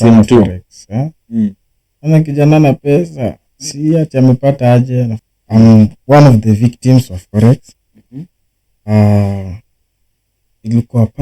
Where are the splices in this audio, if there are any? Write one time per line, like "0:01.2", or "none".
0:05.2